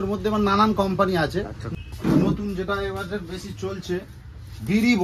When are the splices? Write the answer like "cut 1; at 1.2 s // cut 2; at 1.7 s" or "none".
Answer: cut 1; at 1.6 s